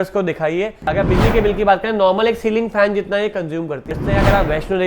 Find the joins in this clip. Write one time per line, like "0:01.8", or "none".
0:00.9
0:03.8